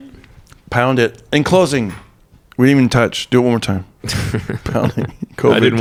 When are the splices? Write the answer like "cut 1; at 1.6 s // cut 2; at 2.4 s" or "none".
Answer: none